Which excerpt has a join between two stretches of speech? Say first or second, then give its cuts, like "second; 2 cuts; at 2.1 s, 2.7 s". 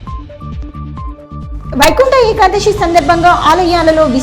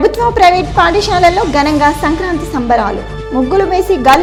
first; 1 cut; at 1.5 s